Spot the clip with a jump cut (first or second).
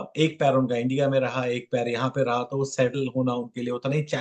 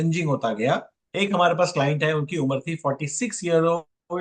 second